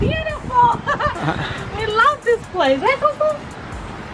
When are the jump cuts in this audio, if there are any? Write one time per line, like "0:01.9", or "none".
none